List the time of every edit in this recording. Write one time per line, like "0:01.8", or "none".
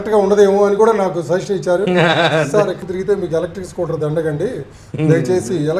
0:02.8